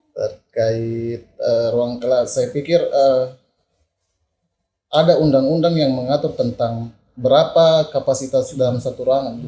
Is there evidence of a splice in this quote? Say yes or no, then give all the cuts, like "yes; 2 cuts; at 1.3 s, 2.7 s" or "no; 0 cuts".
no; 0 cuts